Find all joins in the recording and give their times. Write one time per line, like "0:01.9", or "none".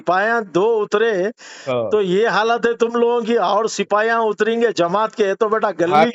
none